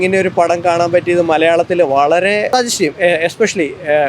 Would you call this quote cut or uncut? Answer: cut